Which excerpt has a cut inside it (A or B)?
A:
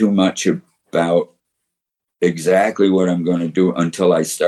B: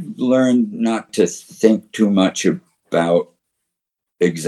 B